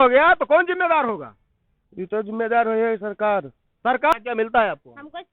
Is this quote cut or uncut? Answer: cut